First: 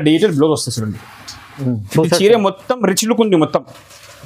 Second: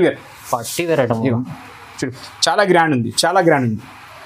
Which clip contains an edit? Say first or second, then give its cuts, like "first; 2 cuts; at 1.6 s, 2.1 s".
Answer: first; 1 cut; at 1.5 s